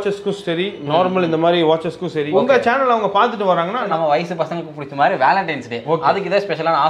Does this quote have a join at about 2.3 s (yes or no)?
yes